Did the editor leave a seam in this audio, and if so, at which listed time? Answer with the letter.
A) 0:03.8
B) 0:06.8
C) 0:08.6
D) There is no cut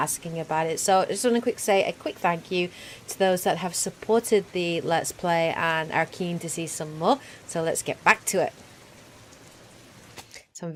D